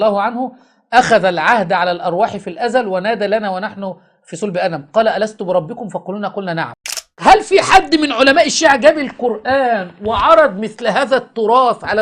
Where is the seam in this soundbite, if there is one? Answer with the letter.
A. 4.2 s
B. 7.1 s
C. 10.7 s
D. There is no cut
B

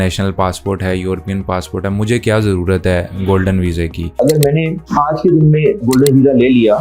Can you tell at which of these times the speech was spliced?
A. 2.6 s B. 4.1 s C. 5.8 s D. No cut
B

